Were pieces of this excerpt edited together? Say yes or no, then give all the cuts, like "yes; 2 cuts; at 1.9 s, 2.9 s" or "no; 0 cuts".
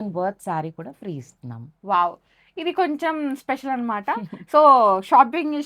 no; 0 cuts